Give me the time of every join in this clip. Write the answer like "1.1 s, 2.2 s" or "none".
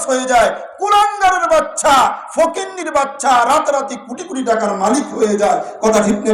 none

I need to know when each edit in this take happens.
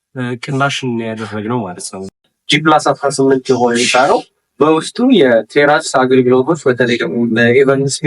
2.1 s

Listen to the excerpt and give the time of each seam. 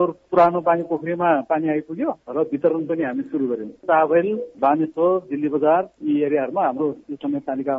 3.8 s, 7.0 s

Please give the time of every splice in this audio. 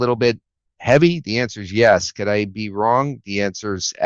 none

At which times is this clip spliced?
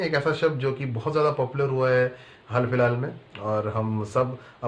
none

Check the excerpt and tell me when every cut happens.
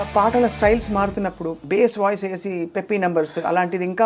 1.5 s

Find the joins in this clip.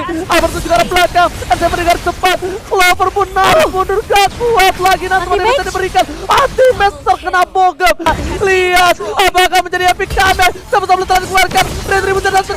8.1 s

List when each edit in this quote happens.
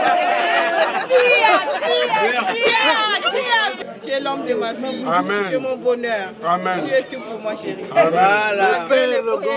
3.8 s

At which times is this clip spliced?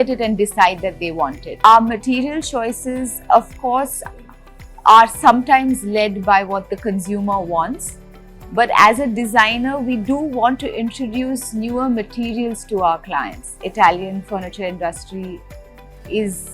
1.6 s, 13.6 s

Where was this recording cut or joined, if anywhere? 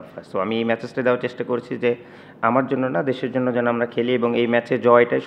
none

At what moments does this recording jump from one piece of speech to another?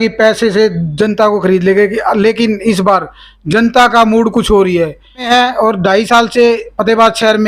5.3 s

